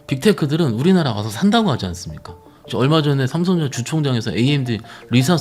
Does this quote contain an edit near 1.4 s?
no; 1 cut; at 2.7 s

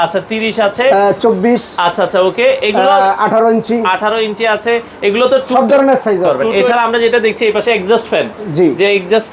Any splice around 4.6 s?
no; 1 cut; at 6.3 s

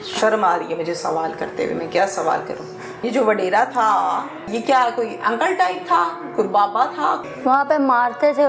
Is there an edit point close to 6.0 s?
no; 3 cuts; at 3.0 s, 4.5 s, 7.2 s

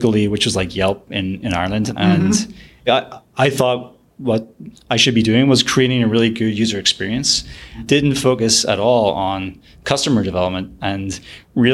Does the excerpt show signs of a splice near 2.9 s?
yes; 3 cuts; at 1.9 s, 2.9 s, 7.8 s

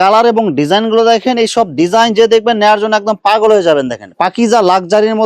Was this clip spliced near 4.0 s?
yes; 1 cut; at 4.0 s

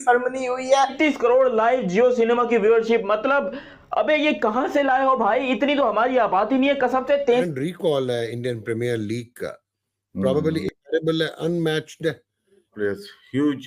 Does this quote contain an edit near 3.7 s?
no; 3 cuts; at 0.9 s, 7.5 s, 12.7 s

